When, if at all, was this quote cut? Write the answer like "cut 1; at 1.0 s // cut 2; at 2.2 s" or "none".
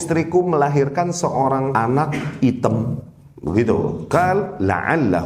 cut 1; at 1.7 s // cut 2; at 4.0 s